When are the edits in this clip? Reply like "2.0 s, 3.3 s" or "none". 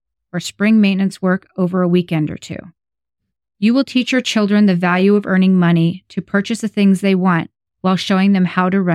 none